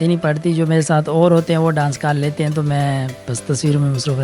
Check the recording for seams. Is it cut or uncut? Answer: uncut